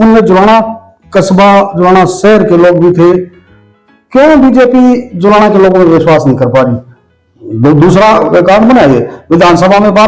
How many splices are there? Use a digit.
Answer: 0